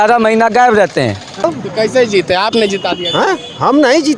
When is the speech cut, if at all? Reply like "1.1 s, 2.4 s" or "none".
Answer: 1.4 s